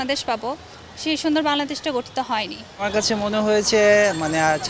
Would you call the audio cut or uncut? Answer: cut